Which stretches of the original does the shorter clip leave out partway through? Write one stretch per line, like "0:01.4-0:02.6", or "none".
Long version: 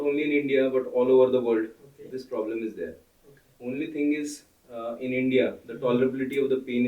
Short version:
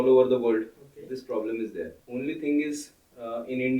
0:03.0-0:03.5